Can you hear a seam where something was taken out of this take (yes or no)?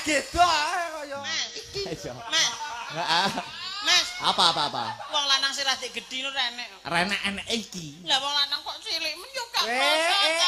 yes